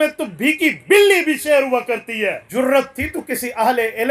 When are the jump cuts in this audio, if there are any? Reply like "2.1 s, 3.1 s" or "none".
2.4 s

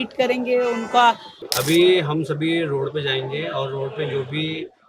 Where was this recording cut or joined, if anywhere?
1.4 s

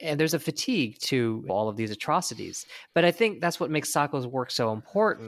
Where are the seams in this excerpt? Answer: 1.5 s

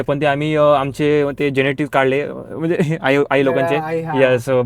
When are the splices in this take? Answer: none

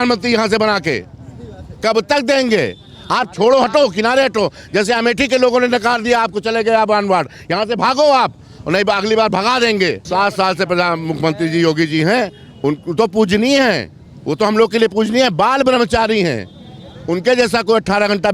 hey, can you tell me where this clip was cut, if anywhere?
10.0 s

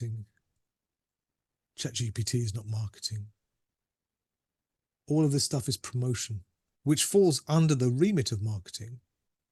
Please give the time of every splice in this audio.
none

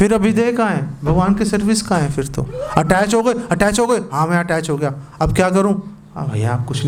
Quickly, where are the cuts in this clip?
none

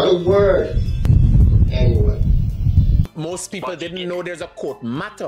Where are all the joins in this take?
3.1 s

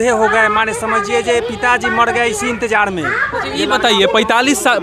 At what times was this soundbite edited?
none

